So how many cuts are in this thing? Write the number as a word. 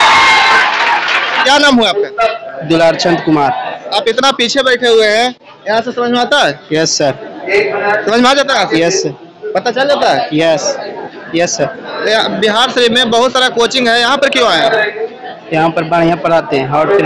one